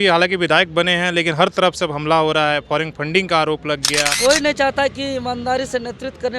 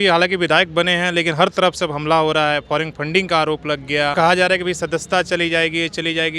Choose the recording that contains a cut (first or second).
first